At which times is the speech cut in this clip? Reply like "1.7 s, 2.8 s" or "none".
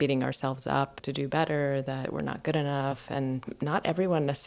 1.0 s, 2.0 s, 3.0 s